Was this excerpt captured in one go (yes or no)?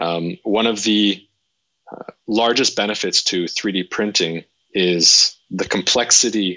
yes